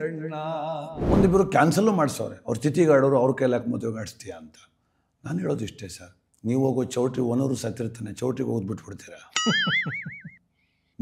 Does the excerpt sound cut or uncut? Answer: cut